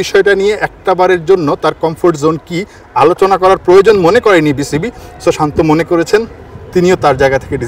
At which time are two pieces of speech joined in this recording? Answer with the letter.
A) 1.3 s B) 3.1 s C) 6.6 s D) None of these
D